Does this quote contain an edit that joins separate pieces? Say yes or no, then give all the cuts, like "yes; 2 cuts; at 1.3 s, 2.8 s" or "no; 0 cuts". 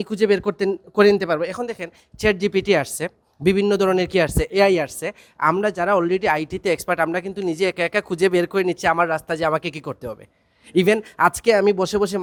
no; 0 cuts